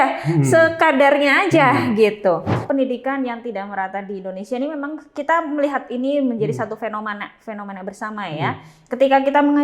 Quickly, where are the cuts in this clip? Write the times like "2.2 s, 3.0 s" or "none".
2.6 s